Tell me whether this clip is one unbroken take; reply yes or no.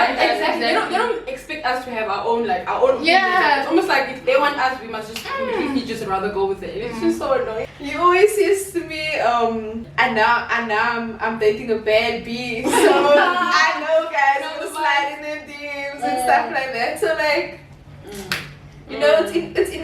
no